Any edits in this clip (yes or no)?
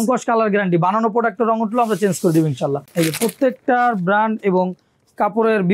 yes